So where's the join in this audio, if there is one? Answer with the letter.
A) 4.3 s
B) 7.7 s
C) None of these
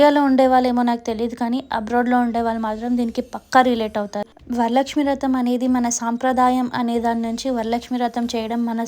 A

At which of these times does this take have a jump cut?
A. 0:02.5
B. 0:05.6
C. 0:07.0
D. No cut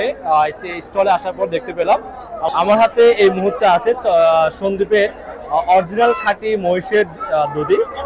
A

